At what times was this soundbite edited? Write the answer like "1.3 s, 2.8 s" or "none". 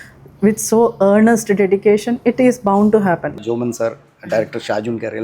3.3 s